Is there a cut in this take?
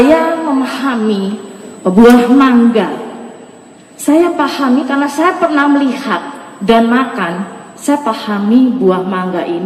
no; 0 cuts

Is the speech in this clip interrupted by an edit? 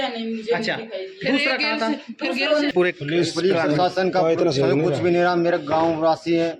yes; 1 cut; at 2.7 s

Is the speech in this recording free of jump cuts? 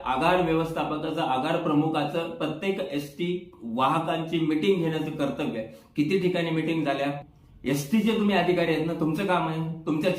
no; 1 cut; at 7.3 s

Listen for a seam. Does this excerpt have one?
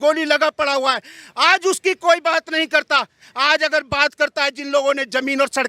no; 0 cuts

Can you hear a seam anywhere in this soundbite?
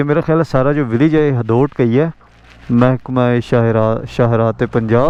no; 0 cuts

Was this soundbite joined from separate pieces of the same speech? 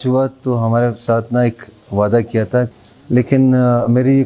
yes; 1 cut; at 2.7 s

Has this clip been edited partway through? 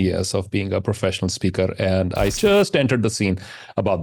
yes; 1 cut; at 2.4 s

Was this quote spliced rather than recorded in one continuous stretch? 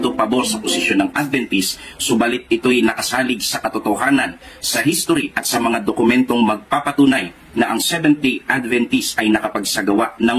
yes; 1 cut; at 4.4 s

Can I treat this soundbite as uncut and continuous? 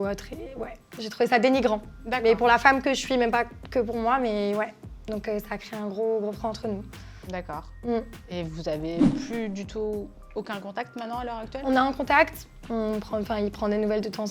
yes; 0 cuts

